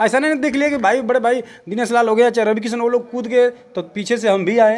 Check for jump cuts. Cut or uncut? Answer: uncut